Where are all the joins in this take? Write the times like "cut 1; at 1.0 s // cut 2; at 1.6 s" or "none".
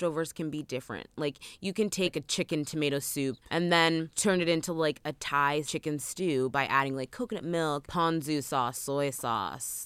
cut 1; at 2.1 s // cut 2; at 3.4 s // cut 3; at 4.1 s // cut 4; at 5.7 s // cut 5; at 7.9 s